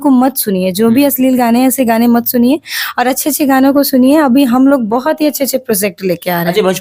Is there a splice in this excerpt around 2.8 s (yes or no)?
no